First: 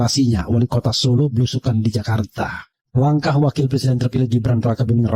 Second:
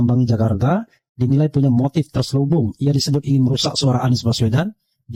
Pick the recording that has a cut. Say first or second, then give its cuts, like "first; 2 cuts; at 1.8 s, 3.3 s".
first; 1 cut; at 2.7 s